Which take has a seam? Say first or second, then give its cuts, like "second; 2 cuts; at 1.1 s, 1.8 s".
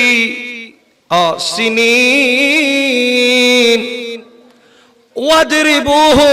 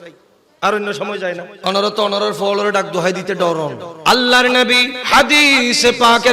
second; 3 cuts; at 1.5 s, 3.9 s, 4.9 s